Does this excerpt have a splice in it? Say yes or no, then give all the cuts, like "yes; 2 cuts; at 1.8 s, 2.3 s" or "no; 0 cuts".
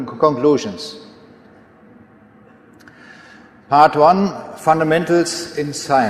no; 0 cuts